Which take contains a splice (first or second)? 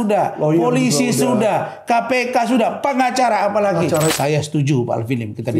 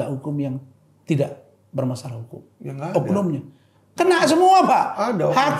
first